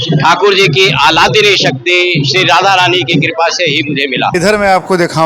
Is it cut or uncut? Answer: cut